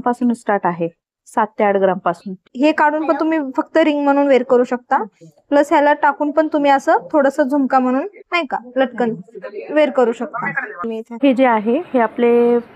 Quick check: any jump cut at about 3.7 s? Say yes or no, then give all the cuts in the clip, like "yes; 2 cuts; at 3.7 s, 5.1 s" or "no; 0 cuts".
no; 2 cuts; at 2.5 s, 11.0 s